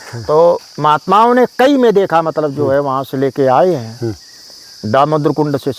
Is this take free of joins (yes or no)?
yes